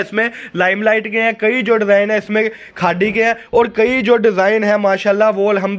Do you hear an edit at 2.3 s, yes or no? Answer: no